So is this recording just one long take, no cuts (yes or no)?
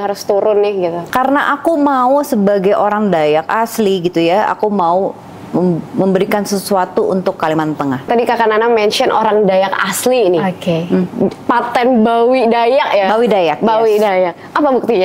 no